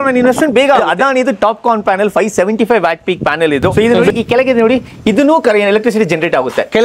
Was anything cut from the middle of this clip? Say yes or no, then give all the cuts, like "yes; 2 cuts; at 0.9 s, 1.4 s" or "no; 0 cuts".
yes; 2 cuts; at 0.8 s, 3.7 s